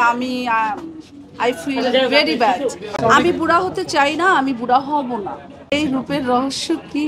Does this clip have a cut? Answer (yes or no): yes